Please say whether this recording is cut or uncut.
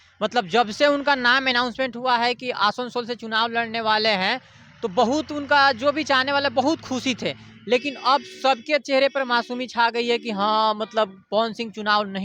uncut